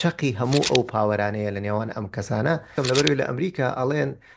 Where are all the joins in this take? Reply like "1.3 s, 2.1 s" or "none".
2.7 s